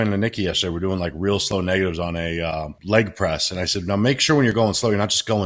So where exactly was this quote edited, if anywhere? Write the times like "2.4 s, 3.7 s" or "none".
2.8 s